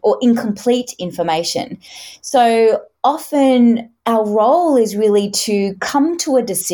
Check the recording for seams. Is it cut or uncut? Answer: uncut